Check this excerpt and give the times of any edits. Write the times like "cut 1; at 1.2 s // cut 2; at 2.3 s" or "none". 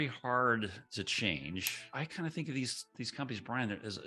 cut 1; at 0.8 s // cut 2; at 2.0 s